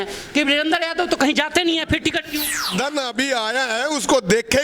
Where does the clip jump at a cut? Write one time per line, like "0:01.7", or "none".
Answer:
0:02.6